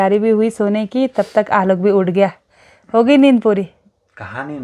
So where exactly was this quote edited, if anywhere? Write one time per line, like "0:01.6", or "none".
none